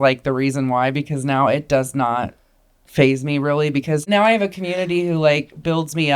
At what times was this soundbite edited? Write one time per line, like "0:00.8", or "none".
0:04.0